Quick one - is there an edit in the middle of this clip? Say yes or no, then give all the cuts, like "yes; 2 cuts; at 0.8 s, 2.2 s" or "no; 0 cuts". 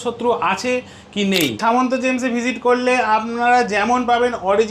yes; 1 cut; at 1.6 s